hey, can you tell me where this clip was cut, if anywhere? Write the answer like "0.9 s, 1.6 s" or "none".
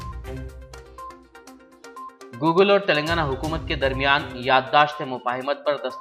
none